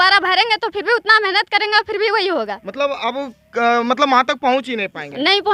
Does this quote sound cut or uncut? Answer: uncut